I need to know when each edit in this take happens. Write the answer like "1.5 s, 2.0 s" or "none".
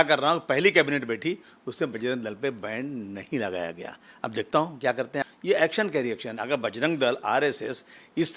5.2 s